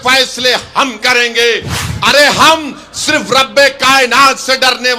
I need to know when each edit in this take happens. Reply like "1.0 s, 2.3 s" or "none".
1.8 s